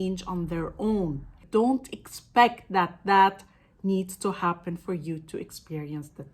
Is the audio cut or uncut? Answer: cut